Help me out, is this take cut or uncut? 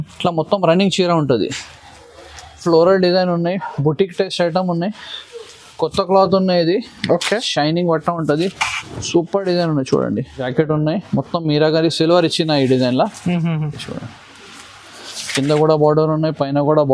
cut